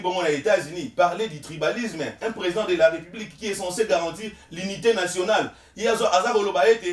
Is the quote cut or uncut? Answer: uncut